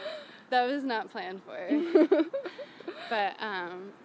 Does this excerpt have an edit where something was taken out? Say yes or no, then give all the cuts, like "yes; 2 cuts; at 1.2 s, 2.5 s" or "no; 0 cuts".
no; 0 cuts